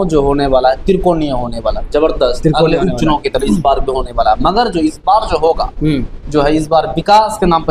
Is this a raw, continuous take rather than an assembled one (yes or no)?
yes